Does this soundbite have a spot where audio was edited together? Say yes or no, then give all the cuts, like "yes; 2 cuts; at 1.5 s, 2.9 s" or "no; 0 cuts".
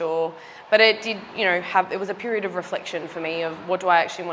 no; 0 cuts